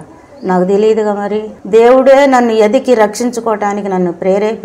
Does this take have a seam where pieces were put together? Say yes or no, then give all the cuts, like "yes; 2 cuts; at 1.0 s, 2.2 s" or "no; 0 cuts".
no; 0 cuts